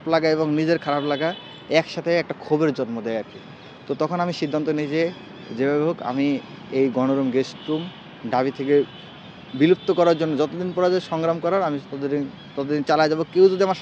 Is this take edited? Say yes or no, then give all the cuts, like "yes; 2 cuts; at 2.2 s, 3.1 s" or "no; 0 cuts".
no; 0 cuts